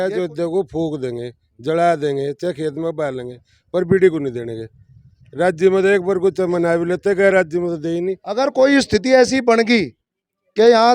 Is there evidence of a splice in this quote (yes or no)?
yes